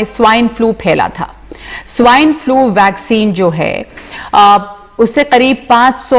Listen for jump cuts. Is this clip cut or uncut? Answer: uncut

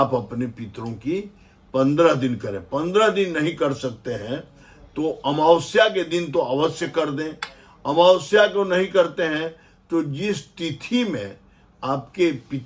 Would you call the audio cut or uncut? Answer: uncut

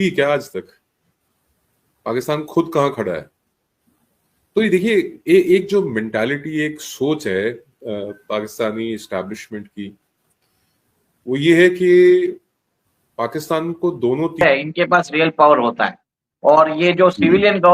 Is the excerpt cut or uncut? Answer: cut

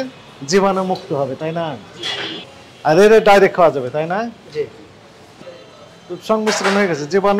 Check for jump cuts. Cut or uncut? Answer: cut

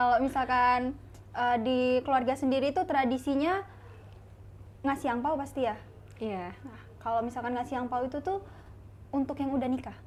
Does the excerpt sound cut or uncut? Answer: uncut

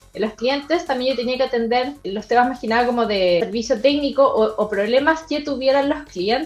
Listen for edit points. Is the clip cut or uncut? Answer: cut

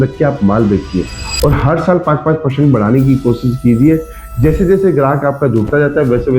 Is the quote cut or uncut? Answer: uncut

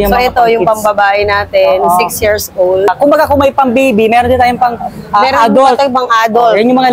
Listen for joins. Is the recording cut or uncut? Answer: cut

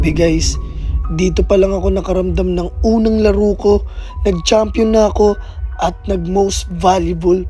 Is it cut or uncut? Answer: uncut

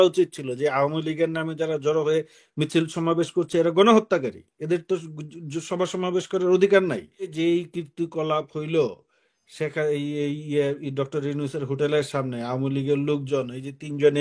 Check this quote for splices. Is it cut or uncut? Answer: cut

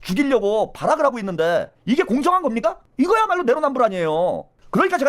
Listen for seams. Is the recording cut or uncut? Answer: uncut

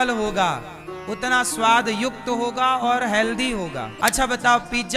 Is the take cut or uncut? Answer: cut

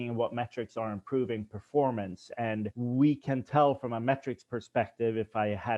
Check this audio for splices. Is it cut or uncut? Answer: cut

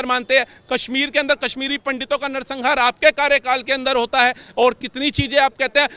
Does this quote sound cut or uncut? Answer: uncut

